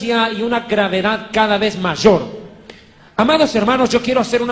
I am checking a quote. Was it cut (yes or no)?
no